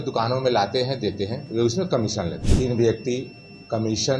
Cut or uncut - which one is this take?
cut